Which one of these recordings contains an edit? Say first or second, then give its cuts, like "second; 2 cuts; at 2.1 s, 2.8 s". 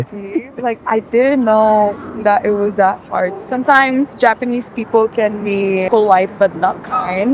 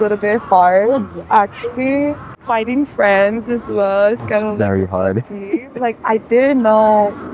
first; 2 cuts; at 3.4 s, 5.8 s